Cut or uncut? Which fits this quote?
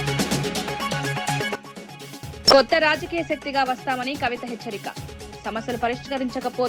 cut